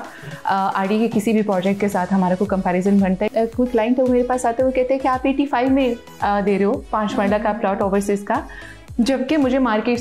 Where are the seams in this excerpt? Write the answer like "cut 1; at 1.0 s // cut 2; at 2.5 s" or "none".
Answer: cut 1; at 3.3 s